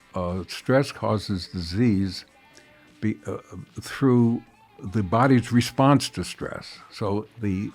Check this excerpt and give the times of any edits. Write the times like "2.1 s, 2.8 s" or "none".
none